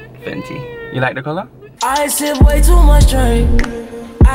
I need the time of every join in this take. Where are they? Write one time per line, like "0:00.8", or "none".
0:01.6